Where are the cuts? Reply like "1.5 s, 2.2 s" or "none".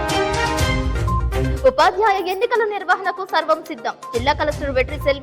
1.5 s